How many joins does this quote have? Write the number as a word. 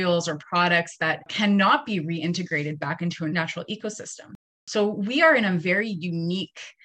three